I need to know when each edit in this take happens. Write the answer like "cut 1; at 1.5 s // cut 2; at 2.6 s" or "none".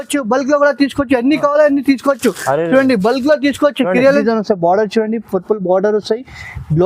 cut 1; at 4.2 s